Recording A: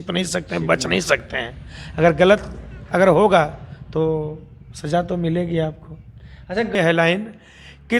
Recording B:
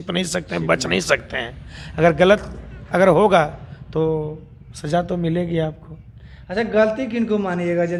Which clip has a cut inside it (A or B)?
A